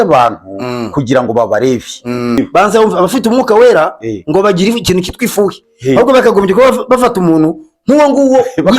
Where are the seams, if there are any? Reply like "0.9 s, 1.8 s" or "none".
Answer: 2.4 s